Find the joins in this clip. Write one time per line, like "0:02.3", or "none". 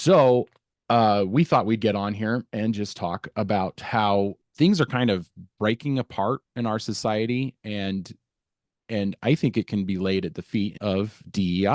0:04.4
0:10.8